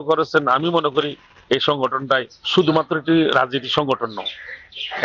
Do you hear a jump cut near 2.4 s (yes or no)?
yes